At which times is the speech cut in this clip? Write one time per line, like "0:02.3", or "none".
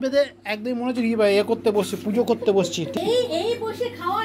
0:02.9